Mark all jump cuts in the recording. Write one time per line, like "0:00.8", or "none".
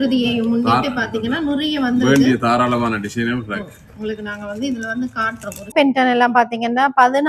0:05.7

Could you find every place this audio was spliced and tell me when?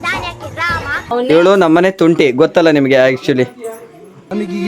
0:01.0

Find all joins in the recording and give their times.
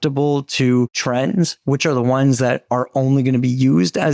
0:01.0

